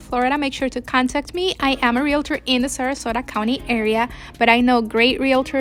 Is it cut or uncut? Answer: uncut